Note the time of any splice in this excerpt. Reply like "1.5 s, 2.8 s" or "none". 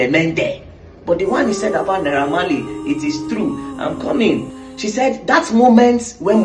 4.5 s

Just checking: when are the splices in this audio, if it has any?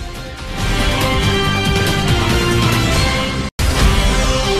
3.5 s

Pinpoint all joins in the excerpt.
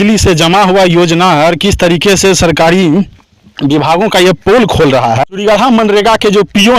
5.3 s

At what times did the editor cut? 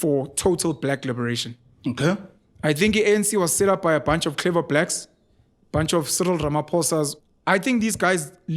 7.1 s

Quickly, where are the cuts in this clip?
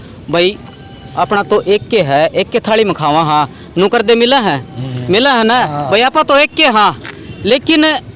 none

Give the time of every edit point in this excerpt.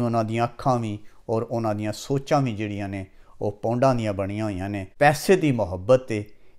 4.8 s

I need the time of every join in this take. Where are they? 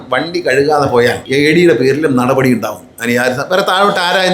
1.2 s

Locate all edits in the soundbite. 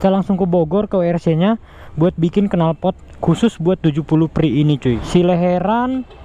5.0 s

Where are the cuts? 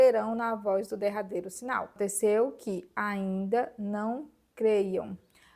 2.0 s

